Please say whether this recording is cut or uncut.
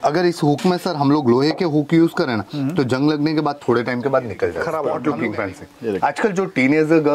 cut